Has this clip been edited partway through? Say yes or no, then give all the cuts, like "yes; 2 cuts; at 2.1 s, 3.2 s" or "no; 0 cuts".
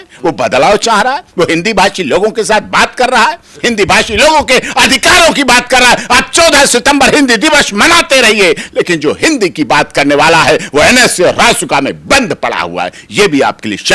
no; 0 cuts